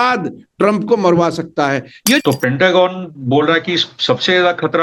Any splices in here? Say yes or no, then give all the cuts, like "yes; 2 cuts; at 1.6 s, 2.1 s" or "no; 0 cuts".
yes; 1 cut; at 2.2 s